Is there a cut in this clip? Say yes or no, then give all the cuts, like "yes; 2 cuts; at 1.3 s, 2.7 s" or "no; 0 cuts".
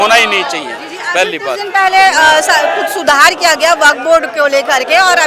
no; 0 cuts